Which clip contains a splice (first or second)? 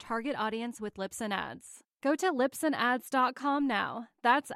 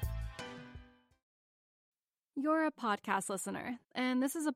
second